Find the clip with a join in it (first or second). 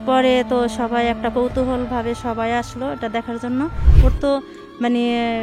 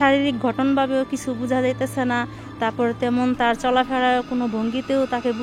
first